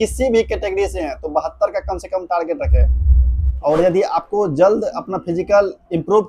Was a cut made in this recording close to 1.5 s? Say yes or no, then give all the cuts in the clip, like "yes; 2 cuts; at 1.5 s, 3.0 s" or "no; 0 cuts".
no; 1 cut; at 3.6 s